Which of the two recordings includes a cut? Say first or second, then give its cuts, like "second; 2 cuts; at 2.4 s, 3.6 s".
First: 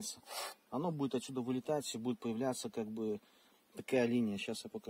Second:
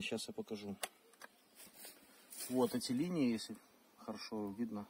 second; 1 cut; at 1.7 s